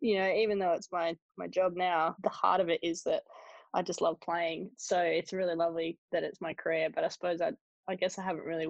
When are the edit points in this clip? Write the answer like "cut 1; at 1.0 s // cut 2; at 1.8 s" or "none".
none